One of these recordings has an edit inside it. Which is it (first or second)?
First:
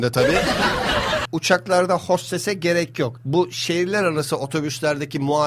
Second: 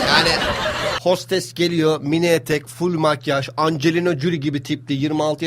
first